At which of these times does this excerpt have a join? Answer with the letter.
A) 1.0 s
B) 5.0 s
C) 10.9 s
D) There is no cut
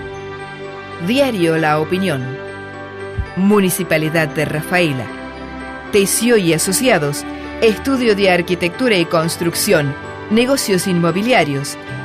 A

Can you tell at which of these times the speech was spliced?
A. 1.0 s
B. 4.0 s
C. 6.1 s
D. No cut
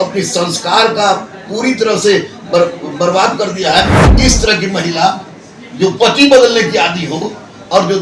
B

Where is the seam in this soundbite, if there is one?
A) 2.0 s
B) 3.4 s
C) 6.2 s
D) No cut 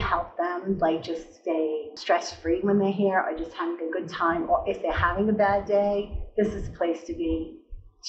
A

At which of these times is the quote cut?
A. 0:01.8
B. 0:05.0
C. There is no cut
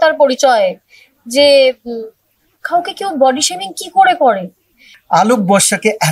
B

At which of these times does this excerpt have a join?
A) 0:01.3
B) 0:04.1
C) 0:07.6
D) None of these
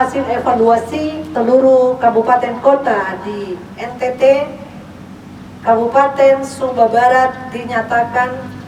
A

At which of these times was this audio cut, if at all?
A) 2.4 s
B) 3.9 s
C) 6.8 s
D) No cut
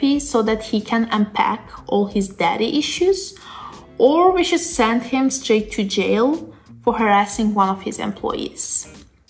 D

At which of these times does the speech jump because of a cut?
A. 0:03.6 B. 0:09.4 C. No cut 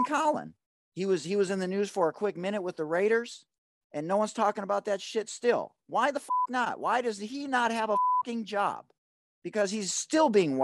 C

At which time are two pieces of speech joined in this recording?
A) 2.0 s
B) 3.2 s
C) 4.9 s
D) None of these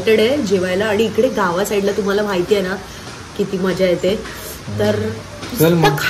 D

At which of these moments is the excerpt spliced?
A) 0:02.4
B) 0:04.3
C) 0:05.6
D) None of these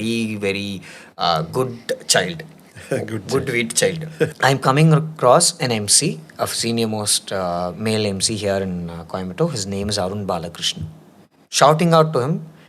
B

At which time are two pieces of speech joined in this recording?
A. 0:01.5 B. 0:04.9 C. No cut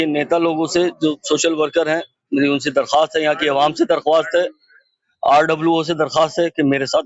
C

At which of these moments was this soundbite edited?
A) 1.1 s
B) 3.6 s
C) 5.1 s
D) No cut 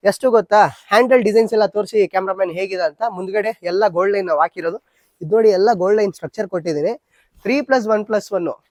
D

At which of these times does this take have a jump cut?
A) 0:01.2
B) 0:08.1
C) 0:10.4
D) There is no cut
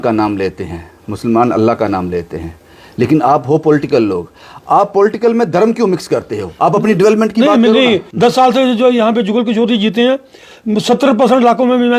B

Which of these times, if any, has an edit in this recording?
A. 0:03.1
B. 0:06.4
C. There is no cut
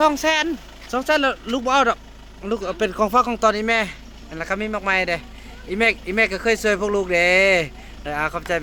C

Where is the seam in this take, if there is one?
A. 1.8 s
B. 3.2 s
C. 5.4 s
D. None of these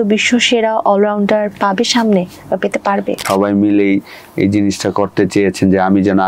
B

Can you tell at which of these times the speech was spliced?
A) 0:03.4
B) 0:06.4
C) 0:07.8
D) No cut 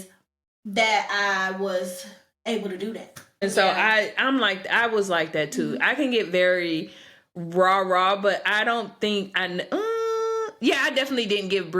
A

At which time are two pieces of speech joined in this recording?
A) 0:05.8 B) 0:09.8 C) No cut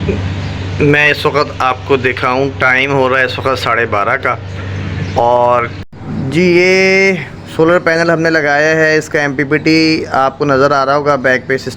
A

